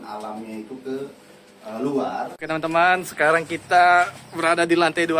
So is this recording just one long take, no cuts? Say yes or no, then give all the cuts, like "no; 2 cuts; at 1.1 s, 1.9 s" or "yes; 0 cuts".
no; 1 cut; at 2.4 s